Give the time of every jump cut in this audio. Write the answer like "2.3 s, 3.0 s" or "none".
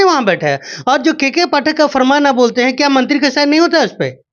none